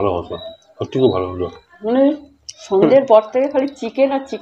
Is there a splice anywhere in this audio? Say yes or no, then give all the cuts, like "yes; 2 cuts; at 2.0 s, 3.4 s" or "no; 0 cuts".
yes; 1 cut; at 1.8 s